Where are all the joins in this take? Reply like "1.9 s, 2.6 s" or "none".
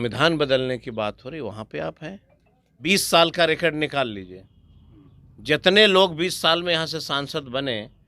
2.8 s